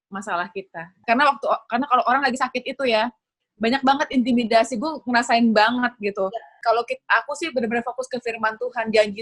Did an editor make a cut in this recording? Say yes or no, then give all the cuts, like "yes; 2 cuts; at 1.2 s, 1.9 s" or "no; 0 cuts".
yes; 2 cuts; at 1.0 s, 6.5 s